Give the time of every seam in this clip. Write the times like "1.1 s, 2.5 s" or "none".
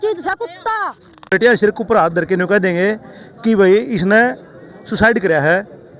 1.3 s